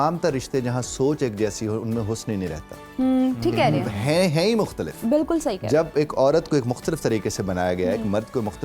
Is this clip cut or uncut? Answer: uncut